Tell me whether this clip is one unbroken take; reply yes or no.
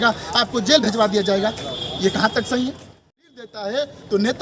no